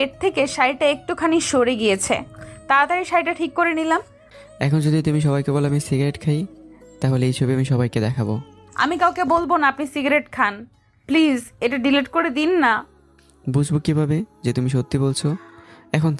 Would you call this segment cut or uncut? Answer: uncut